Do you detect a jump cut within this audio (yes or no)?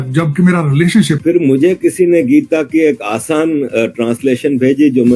yes